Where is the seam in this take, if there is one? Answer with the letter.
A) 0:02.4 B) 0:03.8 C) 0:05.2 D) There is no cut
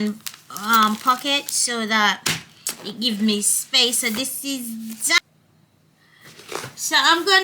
C